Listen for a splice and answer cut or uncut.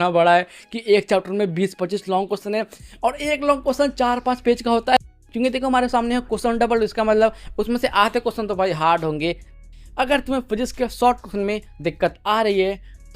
cut